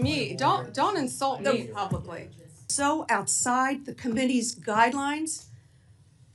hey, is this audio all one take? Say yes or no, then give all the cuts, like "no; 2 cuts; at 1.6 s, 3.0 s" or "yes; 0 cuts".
no; 1 cut; at 2.6 s